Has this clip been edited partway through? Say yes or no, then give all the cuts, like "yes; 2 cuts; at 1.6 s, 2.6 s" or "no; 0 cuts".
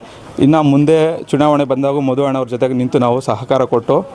no; 0 cuts